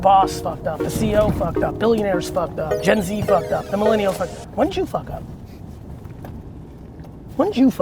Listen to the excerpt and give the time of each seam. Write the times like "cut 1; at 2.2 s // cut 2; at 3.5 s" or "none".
cut 1; at 2.7 s